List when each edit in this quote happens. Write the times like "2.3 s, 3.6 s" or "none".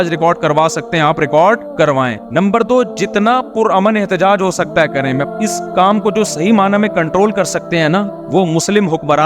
5.3 s